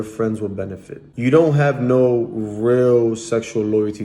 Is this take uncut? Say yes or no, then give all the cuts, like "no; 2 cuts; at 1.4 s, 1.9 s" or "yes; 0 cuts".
no; 1 cut; at 1.1 s